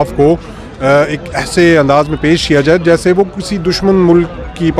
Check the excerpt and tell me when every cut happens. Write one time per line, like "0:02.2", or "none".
none